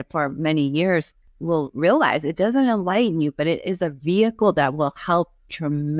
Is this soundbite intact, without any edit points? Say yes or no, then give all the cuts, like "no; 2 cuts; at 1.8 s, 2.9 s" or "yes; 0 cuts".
no; 1 cut; at 1.3 s